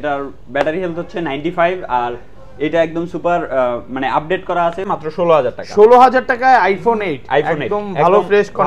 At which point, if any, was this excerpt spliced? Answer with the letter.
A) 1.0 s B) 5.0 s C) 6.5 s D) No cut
B